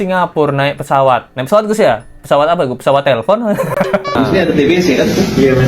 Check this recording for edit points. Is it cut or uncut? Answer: cut